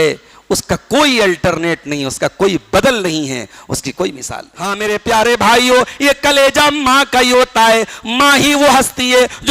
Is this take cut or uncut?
cut